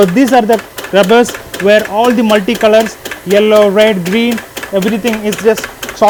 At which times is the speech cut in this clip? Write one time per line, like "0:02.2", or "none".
none